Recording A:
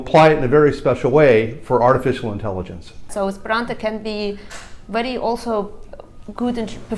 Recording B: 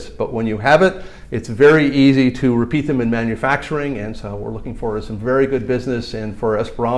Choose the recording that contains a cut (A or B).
A